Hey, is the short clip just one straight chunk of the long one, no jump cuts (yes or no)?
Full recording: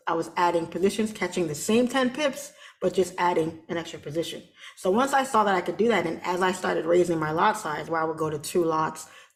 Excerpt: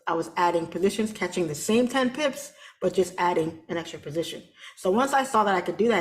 yes